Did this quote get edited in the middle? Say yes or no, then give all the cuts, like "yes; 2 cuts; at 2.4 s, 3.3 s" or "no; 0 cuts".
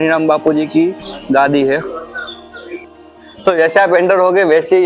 yes; 1 cut; at 2.8 s